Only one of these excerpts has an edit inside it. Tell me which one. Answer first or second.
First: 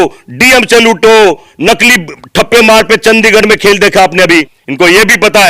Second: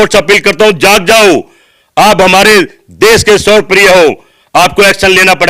first